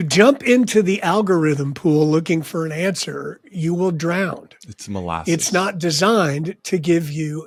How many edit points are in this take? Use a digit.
0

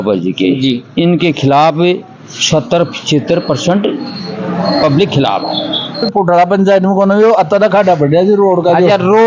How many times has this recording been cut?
1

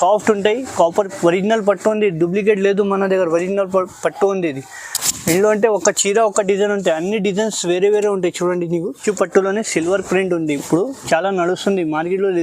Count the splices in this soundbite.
1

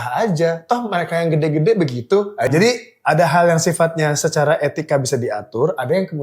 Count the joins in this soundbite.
1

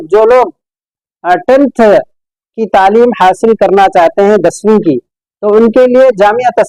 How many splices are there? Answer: 0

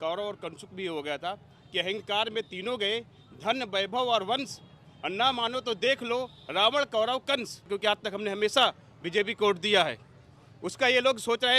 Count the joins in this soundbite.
1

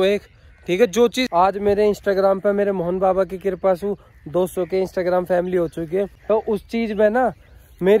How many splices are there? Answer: 2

